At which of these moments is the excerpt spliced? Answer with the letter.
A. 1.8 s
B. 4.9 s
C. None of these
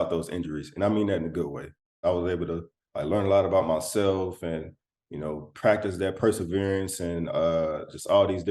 A